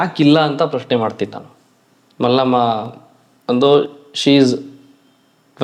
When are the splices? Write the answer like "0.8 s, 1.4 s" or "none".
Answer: none